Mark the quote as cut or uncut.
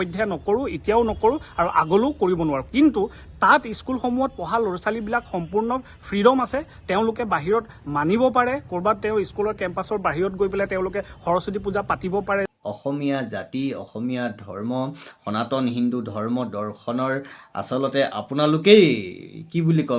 cut